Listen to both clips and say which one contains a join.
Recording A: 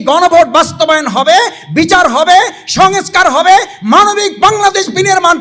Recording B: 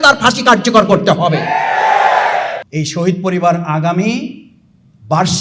B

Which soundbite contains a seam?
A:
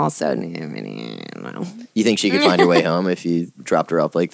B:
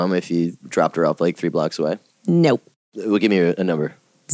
B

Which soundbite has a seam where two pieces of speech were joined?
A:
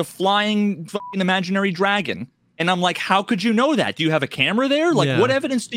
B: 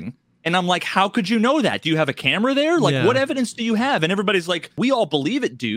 B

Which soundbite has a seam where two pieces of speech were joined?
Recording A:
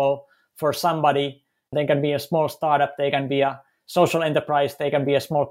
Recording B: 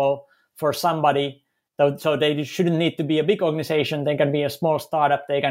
A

